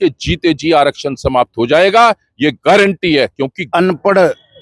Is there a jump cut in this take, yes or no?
yes